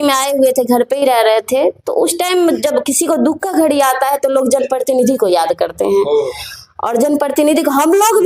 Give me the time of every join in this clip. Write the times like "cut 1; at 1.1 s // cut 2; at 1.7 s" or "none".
none